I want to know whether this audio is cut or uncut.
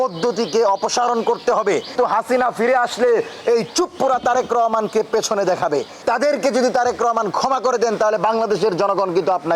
cut